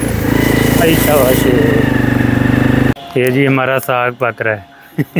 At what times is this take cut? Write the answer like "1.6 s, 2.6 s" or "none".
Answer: 2.9 s